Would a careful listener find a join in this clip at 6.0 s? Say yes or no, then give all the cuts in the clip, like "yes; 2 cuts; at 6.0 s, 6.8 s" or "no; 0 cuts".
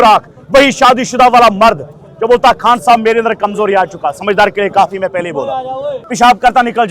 yes; 1 cut; at 6.0 s